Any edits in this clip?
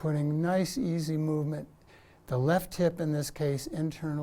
no; 0 cuts

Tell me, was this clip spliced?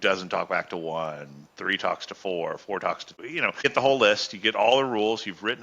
yes; 1 cut; at 3.4 s

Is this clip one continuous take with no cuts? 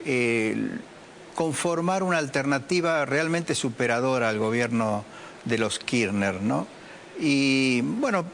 yes; 0 cuts

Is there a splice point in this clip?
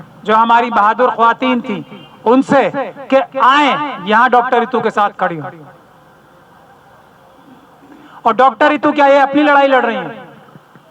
no; 0 cuts

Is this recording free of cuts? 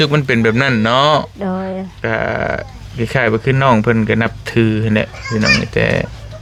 yes; 0 cuts

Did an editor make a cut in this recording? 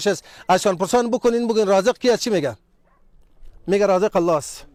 no; 0 cuts

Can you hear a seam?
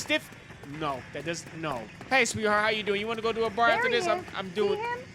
yes; 1 cut; at 1.9 s

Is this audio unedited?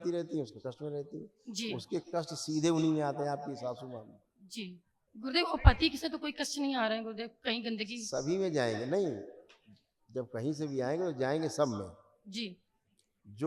yes; 0 cuts

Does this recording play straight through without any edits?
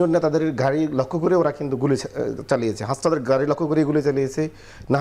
yes; 0 cuts

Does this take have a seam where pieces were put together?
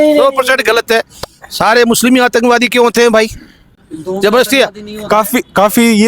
no; 0 cuts

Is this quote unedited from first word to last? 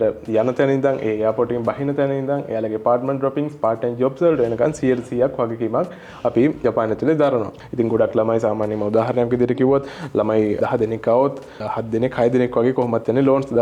no; 3 cuts; at 6.6 s, 7.6 s, 10.6 s

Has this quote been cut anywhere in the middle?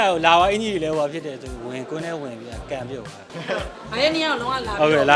yes; 1 cut; at 3.3 s

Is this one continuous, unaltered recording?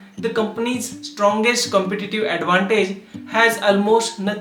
yes; 0 cuts

